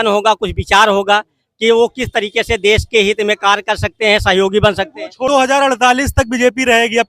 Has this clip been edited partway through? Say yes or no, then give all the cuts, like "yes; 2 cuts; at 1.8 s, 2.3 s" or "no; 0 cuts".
yes; 1 cut; at 5.3 s